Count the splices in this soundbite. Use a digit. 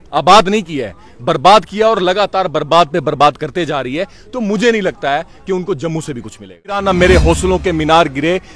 1